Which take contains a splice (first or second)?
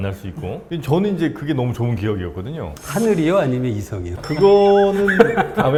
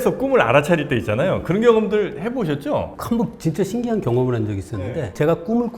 second